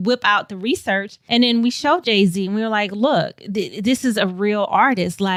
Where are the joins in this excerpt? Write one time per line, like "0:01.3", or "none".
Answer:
none